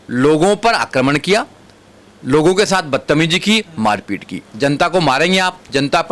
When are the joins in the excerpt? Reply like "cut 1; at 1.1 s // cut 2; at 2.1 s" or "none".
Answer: cut 1; at 4.4 s